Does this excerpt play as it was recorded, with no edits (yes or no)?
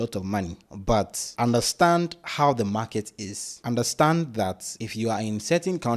yes